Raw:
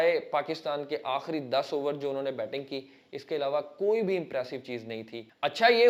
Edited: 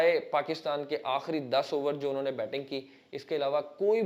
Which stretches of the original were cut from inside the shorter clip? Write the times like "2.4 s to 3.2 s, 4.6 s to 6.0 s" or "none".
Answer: none

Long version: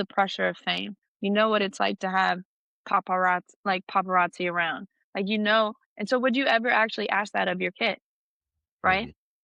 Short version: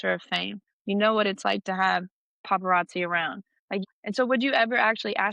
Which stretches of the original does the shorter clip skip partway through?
2.8 s to 3.8 s, 5.3 s to 5.8 s

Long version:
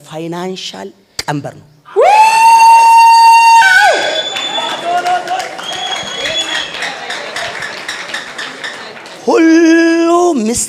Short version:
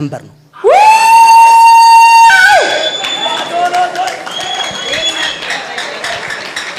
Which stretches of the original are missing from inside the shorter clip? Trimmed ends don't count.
none

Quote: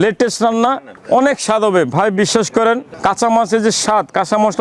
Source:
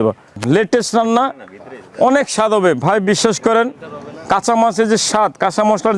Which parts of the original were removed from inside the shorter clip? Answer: 1.4 s to 1.8 s, 3.8 s to 4.2 s

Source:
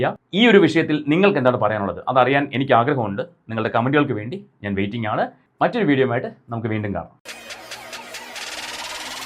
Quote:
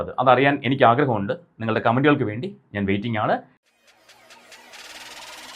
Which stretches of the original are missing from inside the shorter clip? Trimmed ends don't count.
5.4 s to 7.2 s

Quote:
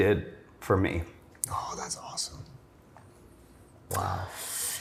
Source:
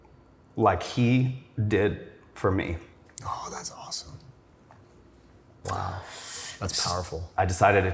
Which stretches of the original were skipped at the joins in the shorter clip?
none

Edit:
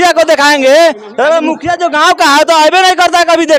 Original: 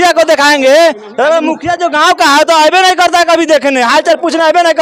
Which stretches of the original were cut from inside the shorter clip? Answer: none

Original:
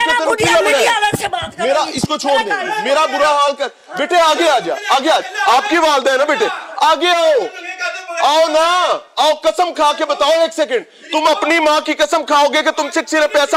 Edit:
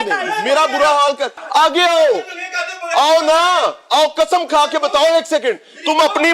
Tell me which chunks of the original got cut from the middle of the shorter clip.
3.8 s to 6.6 s

